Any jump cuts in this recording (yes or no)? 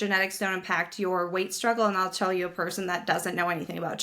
no